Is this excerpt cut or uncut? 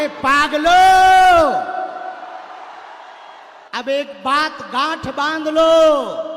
cut